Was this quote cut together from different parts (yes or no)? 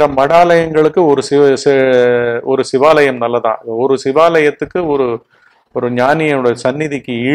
no